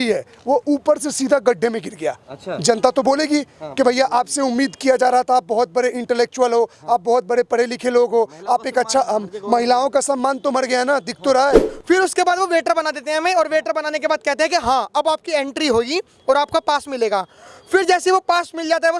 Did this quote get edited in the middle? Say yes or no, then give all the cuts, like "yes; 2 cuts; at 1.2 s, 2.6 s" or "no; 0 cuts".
yes; 1 cut; at 11.7 s